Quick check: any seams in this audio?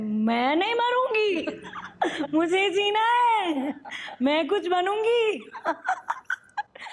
no; 0 cuts

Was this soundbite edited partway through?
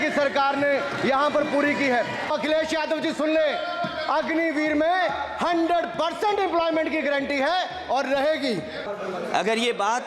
yes; 2 cuts; at 2.3 s, 8.8 s

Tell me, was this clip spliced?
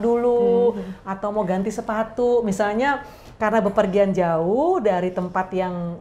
no; 0 cuts

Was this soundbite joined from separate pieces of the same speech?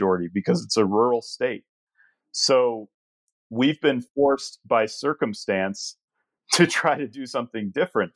no; 0 cuts

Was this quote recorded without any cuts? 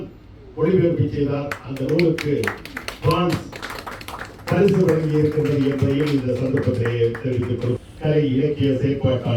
no; 1 cut; at 7.8 s

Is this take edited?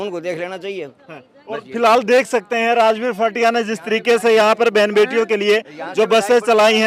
no; 0 cuts

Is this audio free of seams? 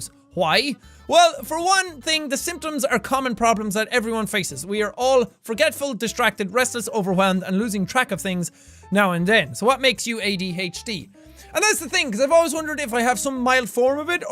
no; 1 cut; at 8.6 s

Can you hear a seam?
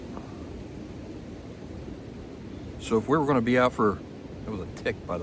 no; 0 cuts

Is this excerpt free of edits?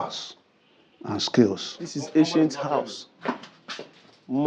no; 1 cut; at 1.7 s

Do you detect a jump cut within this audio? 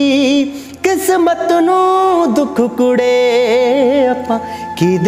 no; 0 cuts

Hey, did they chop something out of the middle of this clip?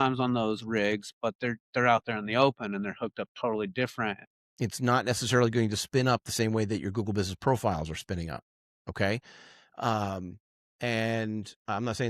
yes; 1 cut; at 4.2 s

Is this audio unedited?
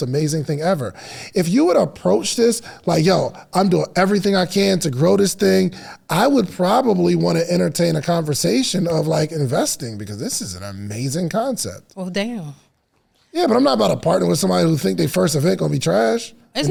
yes; 0 cuts

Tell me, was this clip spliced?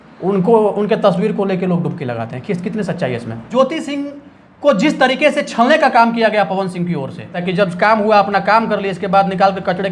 yes; 2 cuts; at 3.5 s, 7.4 s

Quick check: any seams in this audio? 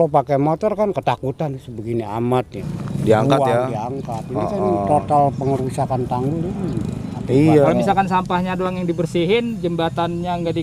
yes; 2 cuts; at 2.6 s, 7.7 s

